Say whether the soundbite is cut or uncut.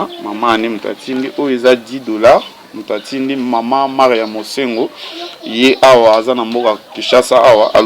uncut